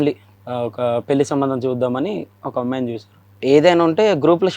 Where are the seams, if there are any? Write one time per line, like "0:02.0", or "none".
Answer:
0:03.2